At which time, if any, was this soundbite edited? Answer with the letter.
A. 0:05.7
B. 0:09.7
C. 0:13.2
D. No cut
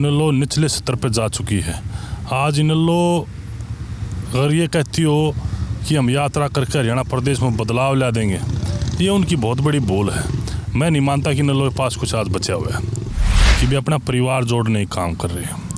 C